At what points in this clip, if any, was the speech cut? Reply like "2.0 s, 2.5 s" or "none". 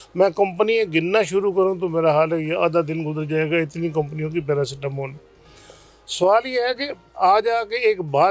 none